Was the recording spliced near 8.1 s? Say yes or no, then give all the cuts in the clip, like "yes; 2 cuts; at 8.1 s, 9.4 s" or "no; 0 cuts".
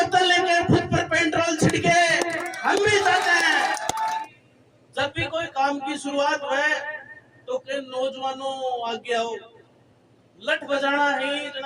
no; 1 cut; at 4.2 s